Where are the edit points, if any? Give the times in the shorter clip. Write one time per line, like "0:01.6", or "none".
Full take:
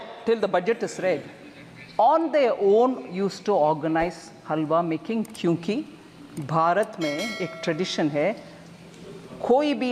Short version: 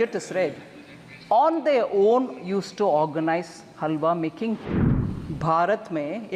0:04.7

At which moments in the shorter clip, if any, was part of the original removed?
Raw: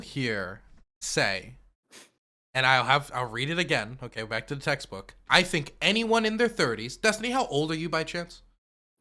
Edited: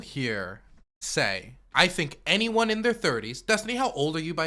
0:01.6

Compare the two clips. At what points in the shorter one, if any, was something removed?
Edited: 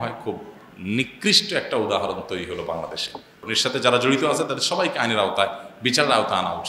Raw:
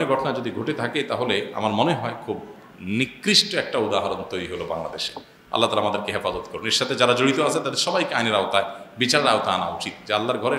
0:03.4

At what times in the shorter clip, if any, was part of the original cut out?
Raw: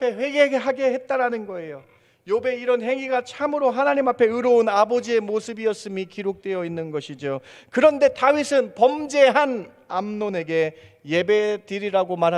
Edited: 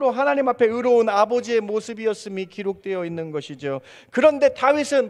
none

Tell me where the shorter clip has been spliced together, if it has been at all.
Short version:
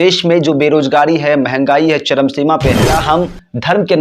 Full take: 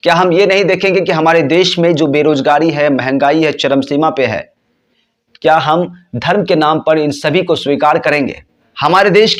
0:03.0

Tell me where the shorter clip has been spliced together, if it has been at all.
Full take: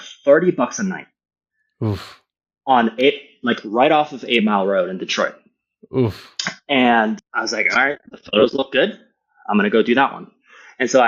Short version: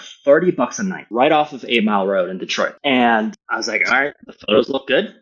0:01.1
0:02.8

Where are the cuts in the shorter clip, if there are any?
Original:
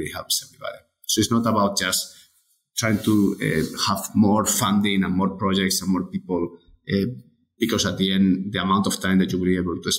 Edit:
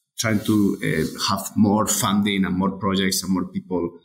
none

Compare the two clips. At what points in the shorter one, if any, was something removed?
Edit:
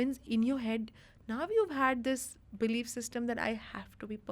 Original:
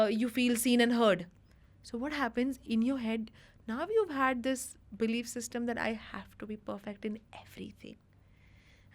none

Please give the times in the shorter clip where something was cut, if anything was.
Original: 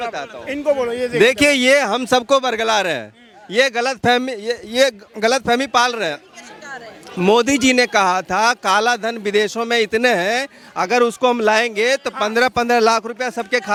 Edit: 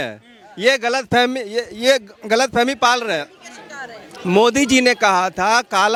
none

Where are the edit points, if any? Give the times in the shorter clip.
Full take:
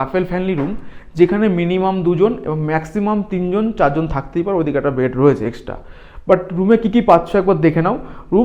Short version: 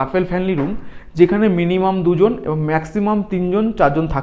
none

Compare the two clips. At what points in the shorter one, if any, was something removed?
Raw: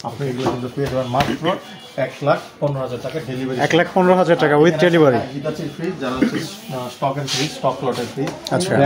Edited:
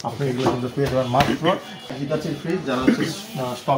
0:01.9

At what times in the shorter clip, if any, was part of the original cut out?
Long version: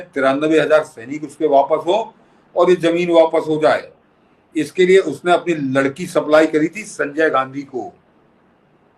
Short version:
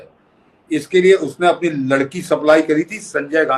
none

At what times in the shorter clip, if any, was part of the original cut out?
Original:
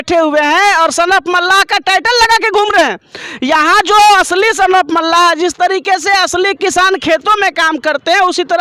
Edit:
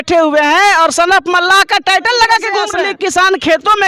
0:02.7

